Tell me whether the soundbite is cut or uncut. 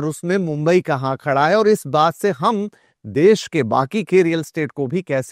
uncut